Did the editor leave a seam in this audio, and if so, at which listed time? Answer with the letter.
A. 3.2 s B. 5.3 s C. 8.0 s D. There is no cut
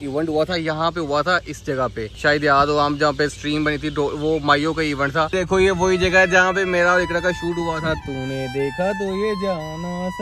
B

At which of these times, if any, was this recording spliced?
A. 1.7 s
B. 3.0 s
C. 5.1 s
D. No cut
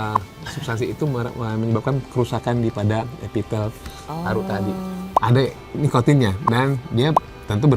C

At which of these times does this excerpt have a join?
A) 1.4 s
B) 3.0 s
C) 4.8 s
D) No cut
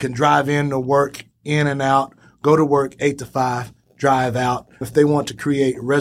C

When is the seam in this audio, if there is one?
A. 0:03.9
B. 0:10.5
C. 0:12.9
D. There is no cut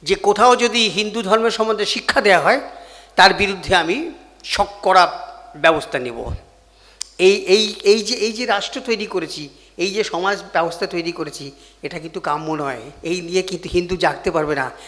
C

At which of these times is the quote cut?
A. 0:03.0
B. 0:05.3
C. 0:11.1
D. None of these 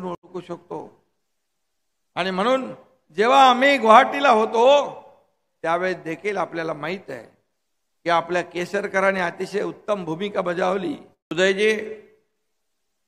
C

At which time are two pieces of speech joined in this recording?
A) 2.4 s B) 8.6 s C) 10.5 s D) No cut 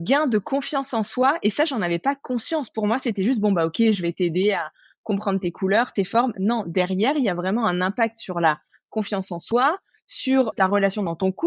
C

